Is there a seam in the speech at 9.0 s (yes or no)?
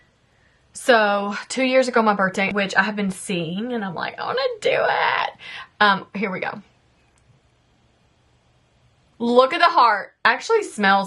no